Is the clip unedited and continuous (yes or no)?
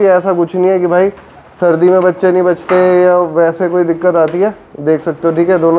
yes